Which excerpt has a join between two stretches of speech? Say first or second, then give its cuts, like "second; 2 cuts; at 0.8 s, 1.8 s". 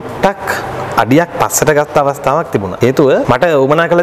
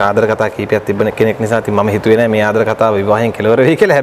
first; 2 cuts; at 2.7 s, 3.2 s